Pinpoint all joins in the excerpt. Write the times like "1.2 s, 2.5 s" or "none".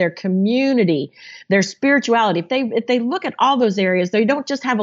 none